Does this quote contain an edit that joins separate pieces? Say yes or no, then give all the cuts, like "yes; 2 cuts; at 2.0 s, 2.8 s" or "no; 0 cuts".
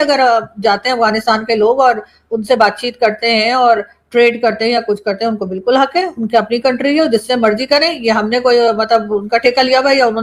no; 0 cuts